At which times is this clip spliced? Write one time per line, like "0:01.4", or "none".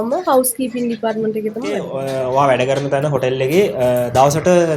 0:01.9